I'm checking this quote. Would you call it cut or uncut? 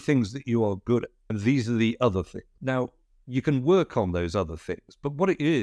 cut